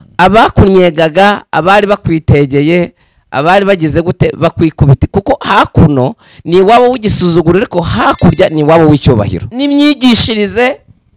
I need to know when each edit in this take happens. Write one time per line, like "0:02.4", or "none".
0:09.4